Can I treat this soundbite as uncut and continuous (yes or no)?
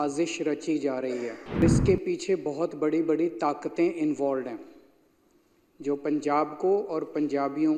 no